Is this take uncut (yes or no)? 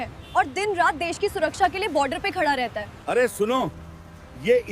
no